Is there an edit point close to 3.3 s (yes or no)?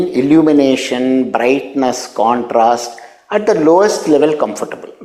no